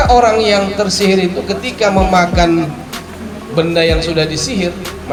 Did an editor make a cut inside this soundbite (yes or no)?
no